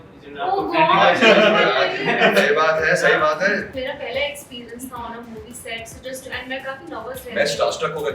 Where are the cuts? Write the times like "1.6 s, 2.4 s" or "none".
3.7 s